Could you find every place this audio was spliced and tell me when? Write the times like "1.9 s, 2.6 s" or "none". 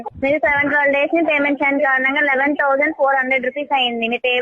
1.3 s